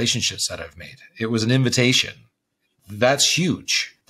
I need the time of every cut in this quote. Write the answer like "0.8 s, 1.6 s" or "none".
none